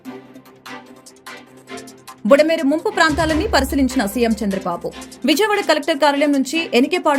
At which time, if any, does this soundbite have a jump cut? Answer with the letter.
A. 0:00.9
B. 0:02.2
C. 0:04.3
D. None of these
B